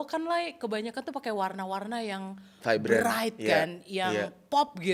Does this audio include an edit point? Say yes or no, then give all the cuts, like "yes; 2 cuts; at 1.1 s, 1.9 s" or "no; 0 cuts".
no; 0 cuts